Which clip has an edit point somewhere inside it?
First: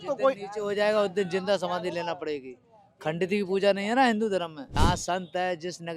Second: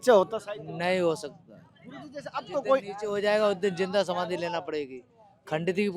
first; 1 cut; at 4.6 s

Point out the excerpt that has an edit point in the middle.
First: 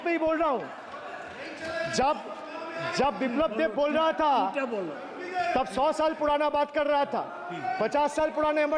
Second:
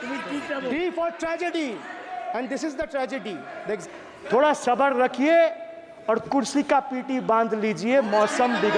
second; 1 cut; at 3.8 s

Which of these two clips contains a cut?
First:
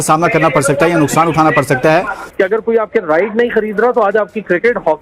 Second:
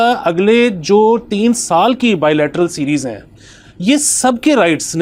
first; 1 cut; at 2.2 s

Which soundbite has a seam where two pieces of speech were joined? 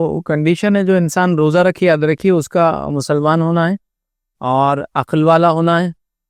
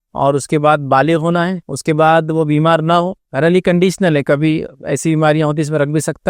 second; 2 cuts; at 1.6 s, 3.2 s

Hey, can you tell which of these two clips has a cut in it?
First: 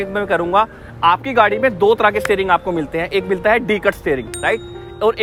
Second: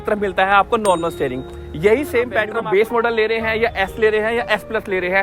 second; 1 cut; at 2.4 s

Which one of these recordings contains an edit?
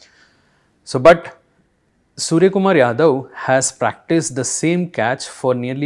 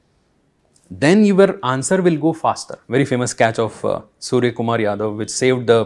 second; 1 cut; at 2.8 s

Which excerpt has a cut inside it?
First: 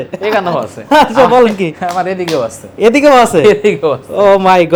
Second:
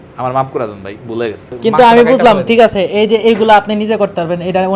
second; 1 cut; at 1.5 s

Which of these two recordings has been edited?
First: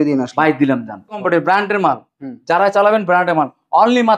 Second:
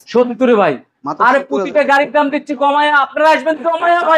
first; 1 cut; at 1.2 s

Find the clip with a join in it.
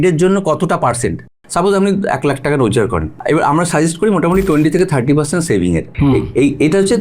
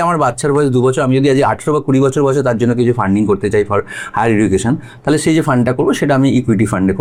first; 3 cuts; at 1.3 s, 3.1 s, 5.9 s

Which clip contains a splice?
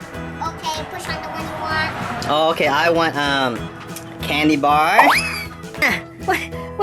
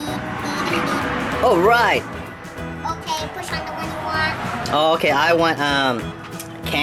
first; 1 cut; at 5.8 s

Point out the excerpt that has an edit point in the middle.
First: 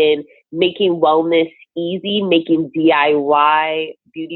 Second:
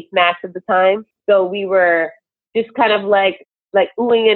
second; 1 cut; at 1.1 s

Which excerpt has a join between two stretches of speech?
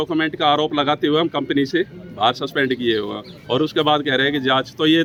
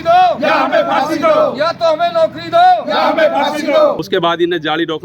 second; 1 cut; at 4.0 s

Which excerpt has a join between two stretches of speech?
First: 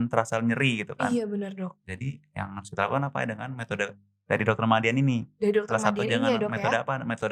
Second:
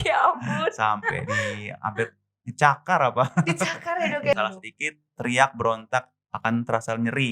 second; 1 cut; at 4.3 s

